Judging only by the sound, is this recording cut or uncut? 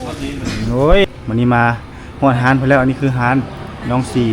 cut